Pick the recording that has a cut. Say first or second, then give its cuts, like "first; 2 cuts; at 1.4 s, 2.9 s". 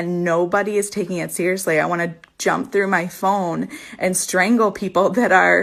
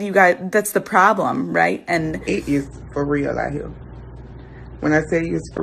second; 1 cut; at 2.2 s